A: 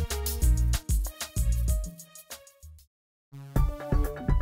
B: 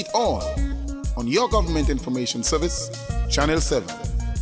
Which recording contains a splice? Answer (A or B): A